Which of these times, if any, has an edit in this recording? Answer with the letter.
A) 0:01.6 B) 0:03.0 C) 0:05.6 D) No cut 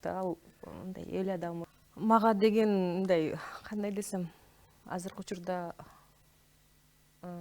A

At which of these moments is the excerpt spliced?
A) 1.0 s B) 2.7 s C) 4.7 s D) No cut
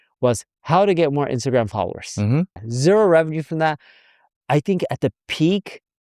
B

